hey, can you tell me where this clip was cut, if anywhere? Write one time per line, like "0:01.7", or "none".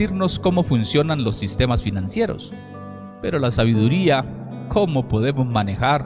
none